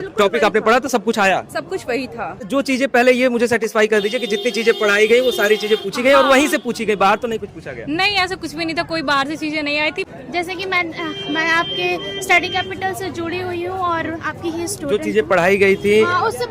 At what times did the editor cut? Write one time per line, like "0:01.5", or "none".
0:02.4
0:10.1